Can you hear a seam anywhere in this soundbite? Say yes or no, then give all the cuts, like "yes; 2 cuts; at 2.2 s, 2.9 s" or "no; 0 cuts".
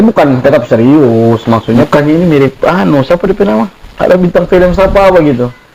yes; 1 cut; at 1.8 s